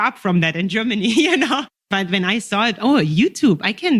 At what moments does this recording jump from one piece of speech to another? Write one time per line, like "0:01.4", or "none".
0:01.9